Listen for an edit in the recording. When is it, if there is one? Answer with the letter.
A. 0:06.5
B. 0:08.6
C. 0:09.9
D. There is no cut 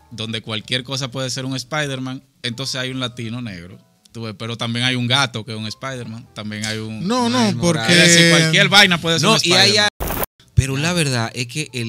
C